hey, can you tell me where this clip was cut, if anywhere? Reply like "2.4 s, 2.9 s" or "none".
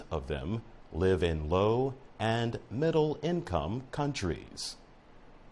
none